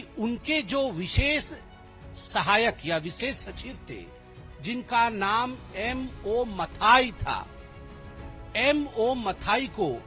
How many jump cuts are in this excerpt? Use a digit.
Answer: 0